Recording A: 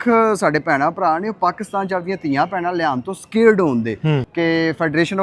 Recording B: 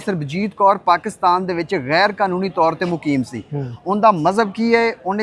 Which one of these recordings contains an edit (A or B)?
A